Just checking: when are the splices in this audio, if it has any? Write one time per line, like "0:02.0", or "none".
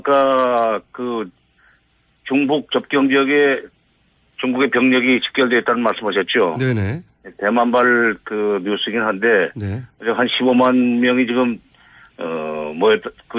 0:07.7